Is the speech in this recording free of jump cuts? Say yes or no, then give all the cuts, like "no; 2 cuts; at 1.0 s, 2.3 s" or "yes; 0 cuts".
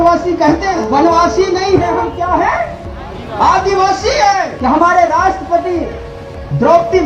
no; 2 cuts; at 0.7 s, 4.5 s